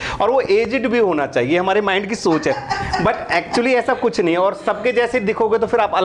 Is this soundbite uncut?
yes; 0 cuts

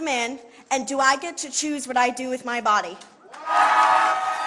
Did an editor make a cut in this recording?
yes; 1 cut; at 3.5 s

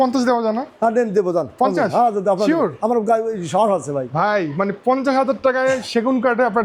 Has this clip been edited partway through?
no; 0 cuts

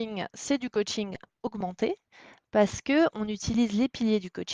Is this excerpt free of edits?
yes; 0 cuts

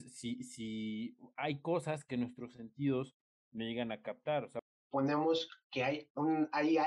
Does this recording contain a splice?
yes; 1 cut; at 4.6 s

